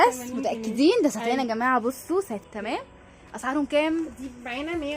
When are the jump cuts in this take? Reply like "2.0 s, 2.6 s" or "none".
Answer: 2.4 s